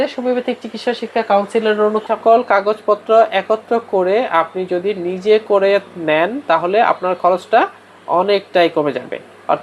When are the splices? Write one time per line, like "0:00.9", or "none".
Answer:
0:02.0